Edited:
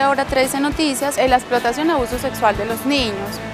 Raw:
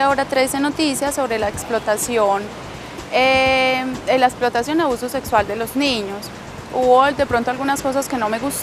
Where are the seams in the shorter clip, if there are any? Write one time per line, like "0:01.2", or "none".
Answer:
0:01.1